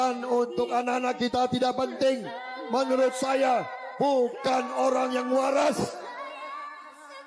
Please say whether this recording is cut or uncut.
uncut